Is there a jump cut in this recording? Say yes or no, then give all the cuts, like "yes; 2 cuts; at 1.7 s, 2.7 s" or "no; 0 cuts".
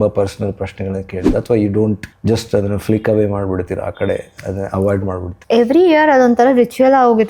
yes; 2 cuts; at 2.1 s, 5.3 s